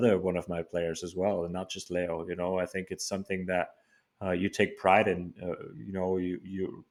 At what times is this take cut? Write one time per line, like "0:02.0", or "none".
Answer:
none

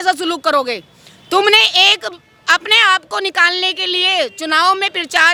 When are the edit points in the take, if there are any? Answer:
none

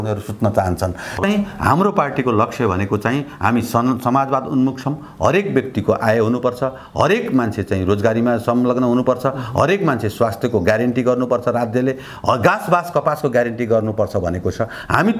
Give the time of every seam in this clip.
0:01.2

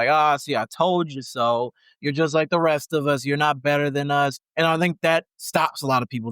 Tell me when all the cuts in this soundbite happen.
0:04.4

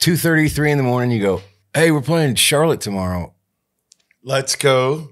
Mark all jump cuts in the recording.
0:01.6

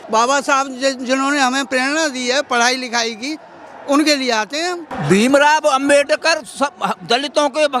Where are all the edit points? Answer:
0:04.9

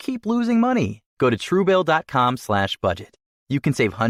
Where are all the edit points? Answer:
none

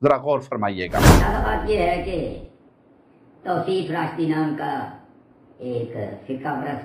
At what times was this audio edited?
0:01.1

